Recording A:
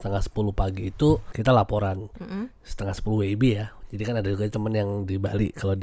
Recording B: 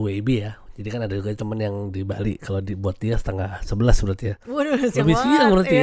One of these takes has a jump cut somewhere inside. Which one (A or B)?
A